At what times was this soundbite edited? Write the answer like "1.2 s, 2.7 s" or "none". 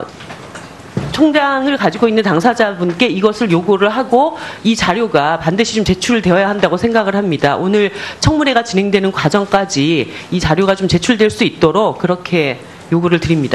none